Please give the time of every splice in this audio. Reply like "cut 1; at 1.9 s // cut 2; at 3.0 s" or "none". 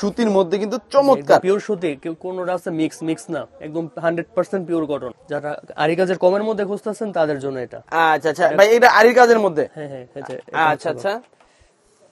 cut 1; at 5.1 s